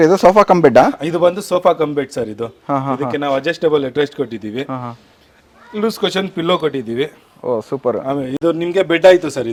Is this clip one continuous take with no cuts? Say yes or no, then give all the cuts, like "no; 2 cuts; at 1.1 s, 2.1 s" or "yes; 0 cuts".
yes; 0 cuts